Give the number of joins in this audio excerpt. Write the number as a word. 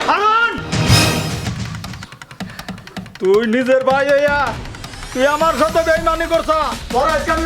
zero